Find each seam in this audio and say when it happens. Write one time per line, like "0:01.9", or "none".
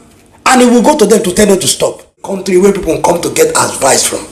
0:02.6